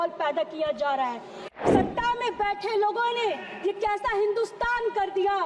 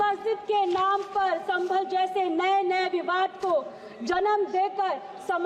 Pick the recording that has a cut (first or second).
first